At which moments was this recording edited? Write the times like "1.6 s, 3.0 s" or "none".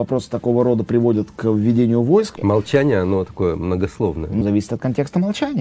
2.4 s, 4.4 s